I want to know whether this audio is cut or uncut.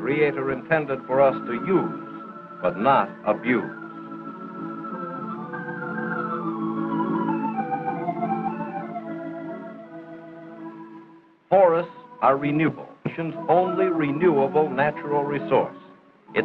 cut